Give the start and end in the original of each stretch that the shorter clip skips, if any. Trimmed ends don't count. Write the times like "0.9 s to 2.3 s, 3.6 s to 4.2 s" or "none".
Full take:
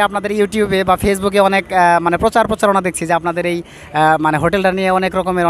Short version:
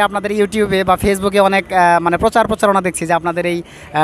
none